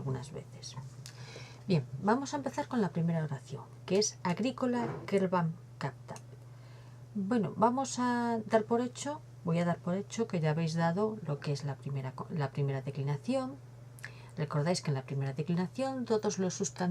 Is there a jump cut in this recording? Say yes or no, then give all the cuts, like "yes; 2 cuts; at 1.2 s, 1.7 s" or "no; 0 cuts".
yes; 1 cut; at 15.5 s